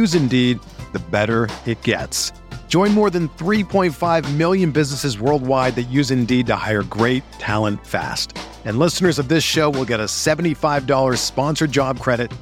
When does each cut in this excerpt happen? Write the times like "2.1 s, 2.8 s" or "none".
none